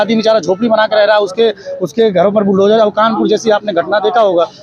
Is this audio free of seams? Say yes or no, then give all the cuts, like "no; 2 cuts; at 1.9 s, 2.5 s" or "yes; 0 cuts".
yes; 0 cuts